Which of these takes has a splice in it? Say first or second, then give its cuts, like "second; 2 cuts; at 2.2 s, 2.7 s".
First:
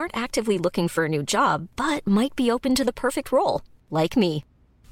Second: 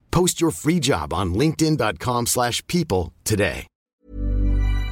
second; 1 cut; at 4.0 s